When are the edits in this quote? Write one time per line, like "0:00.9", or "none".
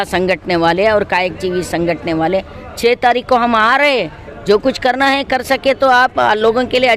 none